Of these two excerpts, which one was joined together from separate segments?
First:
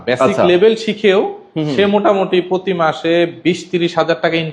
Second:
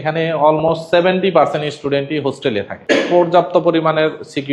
second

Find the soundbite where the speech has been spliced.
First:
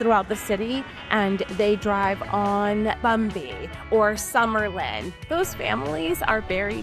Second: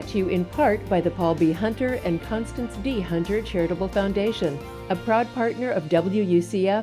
first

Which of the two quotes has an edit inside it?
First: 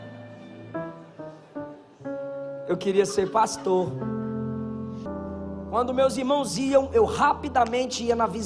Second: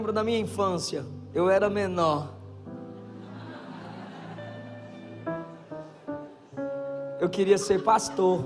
first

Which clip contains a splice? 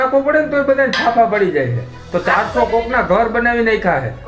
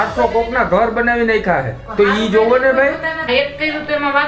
second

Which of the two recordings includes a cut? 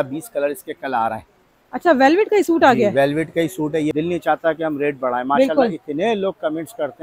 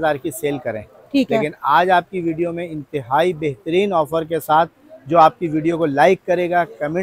first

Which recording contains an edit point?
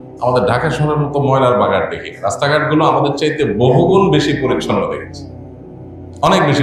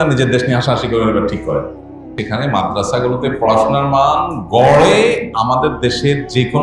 second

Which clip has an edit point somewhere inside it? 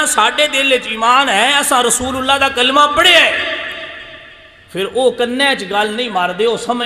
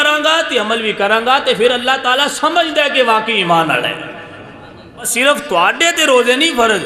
second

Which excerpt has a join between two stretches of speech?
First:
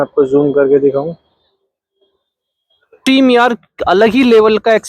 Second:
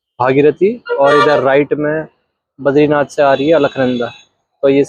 first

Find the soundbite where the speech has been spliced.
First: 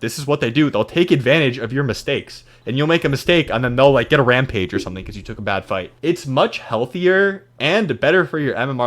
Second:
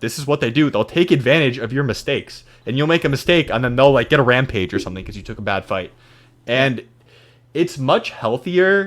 first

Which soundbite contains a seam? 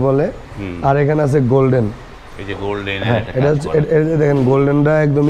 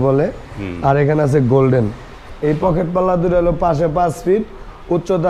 second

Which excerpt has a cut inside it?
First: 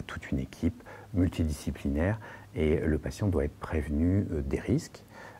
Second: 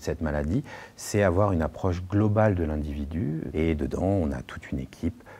second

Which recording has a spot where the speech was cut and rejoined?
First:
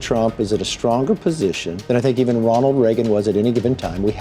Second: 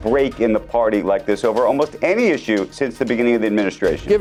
first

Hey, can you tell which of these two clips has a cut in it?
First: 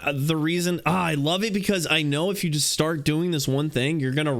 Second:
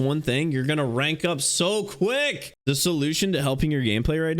second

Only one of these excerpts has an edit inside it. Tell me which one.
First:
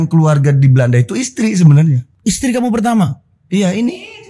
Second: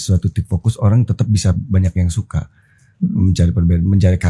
first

